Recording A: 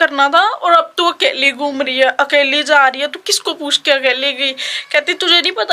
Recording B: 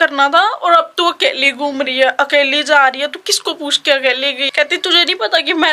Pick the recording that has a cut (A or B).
B